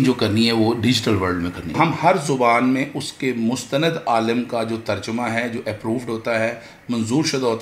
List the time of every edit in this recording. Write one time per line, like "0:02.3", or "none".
0:01.7